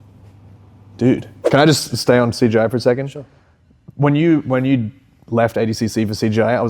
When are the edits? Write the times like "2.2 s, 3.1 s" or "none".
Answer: 1.4 s